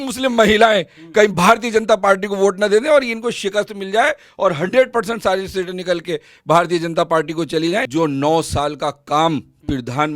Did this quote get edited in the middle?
yes; 1 cut; at 7.9 s

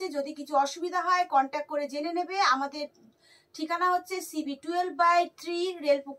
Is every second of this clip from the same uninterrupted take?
yes; 0 cuts

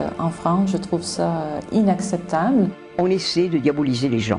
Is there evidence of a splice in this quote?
yes; 1 cut; at 2.8 s

